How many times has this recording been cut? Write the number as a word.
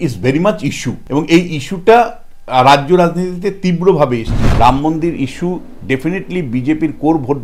two